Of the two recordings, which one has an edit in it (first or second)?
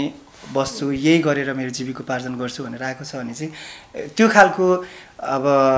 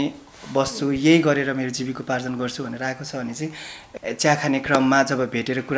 second